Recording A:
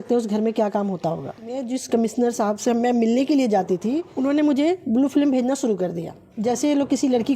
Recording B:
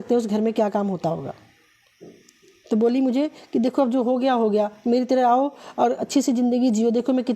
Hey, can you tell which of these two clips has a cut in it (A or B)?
A